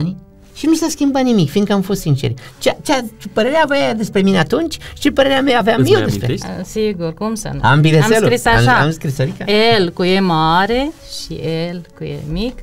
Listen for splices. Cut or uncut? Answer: uncut